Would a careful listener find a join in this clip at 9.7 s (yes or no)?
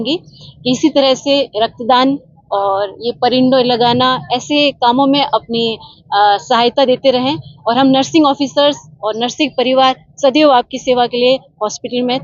no